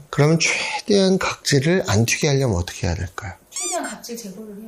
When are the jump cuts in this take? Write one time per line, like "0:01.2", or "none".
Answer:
none